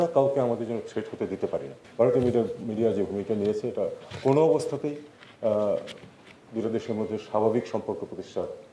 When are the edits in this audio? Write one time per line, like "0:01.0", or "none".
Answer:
0:01.8